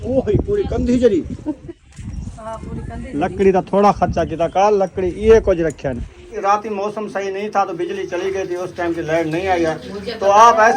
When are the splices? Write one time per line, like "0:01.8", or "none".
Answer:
0:06.4

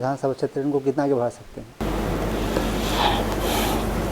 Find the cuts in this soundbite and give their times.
none

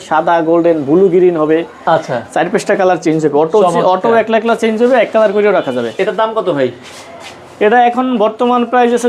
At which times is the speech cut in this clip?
none

